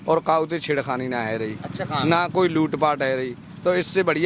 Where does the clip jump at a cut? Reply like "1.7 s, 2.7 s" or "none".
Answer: none